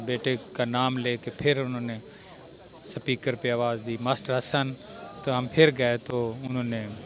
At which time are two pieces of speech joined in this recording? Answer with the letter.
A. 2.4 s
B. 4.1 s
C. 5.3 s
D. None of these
D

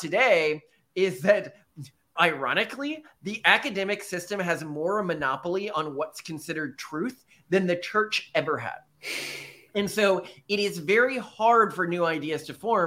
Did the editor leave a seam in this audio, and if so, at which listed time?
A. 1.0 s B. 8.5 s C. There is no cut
C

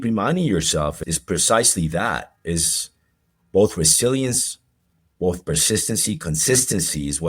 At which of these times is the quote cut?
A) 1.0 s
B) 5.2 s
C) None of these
A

